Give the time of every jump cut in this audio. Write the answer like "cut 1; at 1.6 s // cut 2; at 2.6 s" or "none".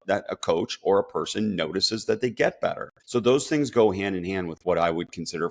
cut 1; at 2.9 s

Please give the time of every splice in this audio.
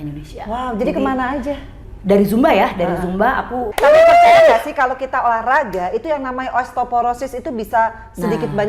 cut 1; at 3.7 s

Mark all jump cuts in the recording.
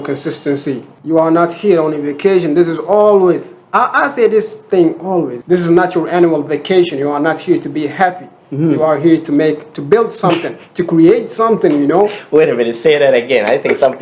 cut 1; at 0.9 s // cut 2; at 5.4 s

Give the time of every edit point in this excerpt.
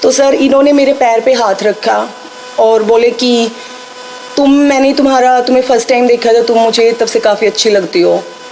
none

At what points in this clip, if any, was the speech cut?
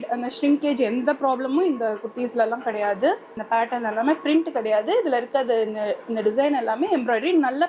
cut 1; at 3.4 s

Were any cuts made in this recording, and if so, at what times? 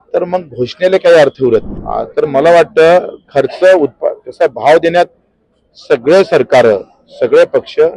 cut 1; at 1.8 s

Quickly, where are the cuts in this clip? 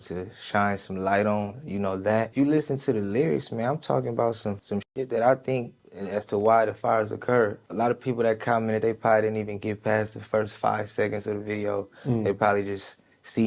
cut 1; at 2.3 s // cut 2; at 4.6 s // cut 3; at 5.8 s

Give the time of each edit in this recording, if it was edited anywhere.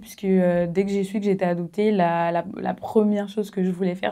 none

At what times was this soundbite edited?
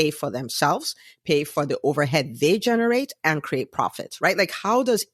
none

